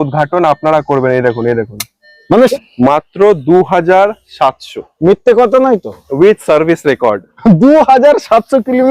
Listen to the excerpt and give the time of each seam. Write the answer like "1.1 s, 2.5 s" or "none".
2.5 s